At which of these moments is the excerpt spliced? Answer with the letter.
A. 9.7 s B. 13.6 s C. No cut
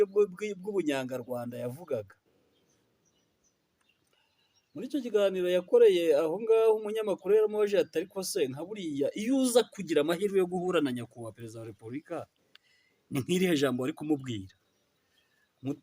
C